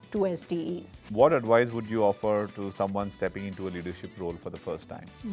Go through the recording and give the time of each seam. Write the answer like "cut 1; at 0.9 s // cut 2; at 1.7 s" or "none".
cut 1; at 1.0 s